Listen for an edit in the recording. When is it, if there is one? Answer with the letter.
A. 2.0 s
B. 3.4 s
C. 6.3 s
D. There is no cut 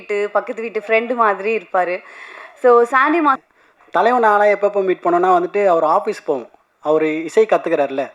B